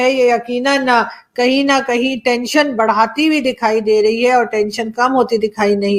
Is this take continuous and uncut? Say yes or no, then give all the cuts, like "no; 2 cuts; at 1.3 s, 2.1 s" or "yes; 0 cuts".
yes; 0 cuts